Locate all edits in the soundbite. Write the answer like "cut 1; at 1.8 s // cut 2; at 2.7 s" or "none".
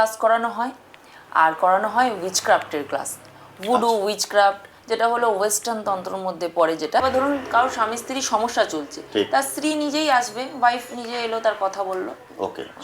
cut 1; at 7.0 s